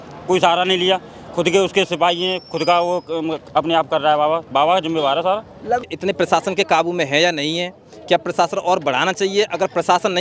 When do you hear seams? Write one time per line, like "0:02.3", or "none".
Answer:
0:05.8